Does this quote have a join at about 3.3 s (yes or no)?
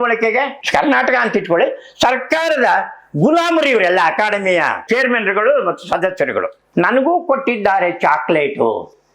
no